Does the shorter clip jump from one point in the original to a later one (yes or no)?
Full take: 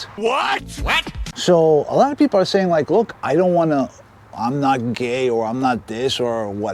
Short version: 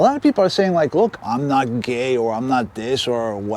yes